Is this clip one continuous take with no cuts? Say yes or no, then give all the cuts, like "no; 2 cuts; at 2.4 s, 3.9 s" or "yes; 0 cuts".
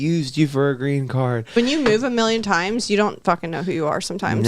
no; 1 cut; at 1.5 s